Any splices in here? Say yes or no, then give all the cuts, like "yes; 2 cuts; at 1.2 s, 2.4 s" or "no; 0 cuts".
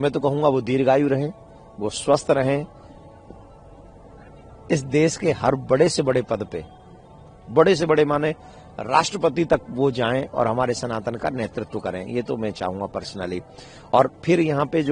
no; 0 cuts